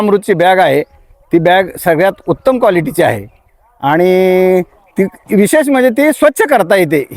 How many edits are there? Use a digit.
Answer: 0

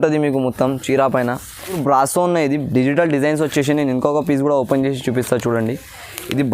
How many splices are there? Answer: 1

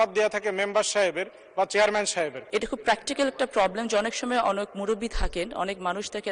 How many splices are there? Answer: 1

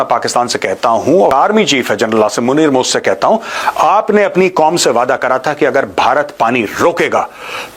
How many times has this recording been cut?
2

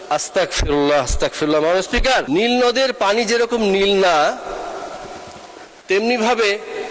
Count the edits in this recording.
1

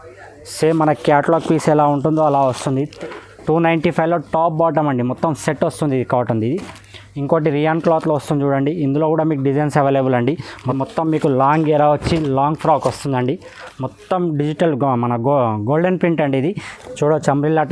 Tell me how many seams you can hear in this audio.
3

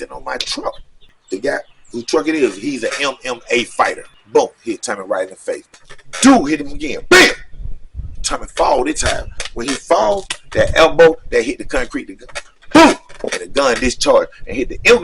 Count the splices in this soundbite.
3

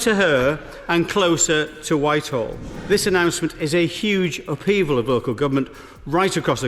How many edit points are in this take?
1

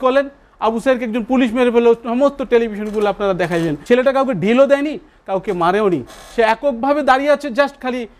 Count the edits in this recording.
1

